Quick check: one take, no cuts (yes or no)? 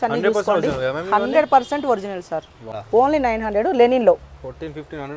no